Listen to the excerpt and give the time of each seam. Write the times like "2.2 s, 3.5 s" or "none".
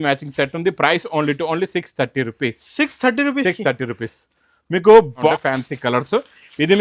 5.3 s